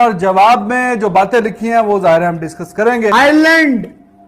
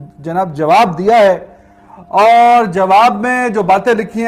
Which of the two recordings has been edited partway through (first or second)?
first